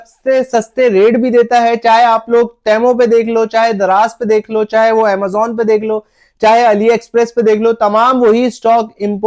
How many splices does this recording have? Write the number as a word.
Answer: zero